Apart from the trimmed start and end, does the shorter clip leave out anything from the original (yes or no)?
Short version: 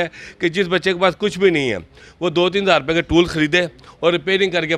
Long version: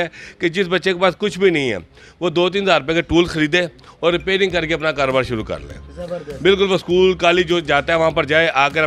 no